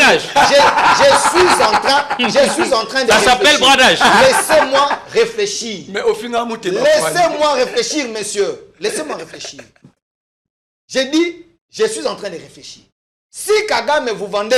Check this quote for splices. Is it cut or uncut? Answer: uncut